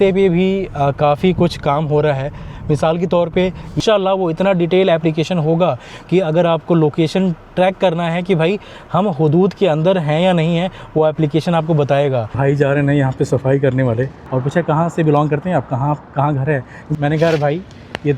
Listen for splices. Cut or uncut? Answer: cut